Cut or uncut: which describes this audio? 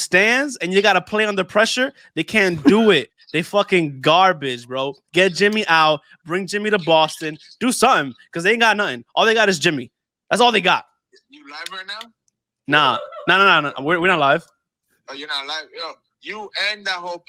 uncut